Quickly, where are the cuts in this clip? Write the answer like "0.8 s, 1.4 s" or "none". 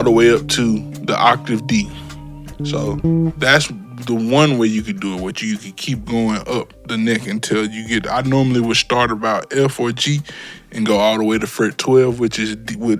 2.6 s